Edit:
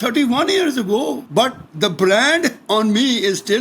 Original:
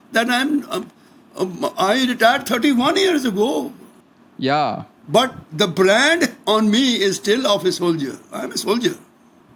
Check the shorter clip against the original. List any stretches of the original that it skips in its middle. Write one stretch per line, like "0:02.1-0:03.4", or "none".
0:03.7-0:05.0